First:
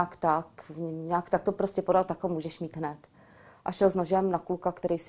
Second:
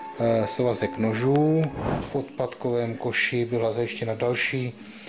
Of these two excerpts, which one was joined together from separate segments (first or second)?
second